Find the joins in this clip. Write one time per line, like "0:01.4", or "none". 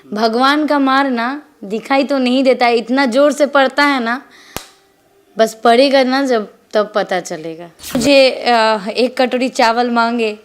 0:08.0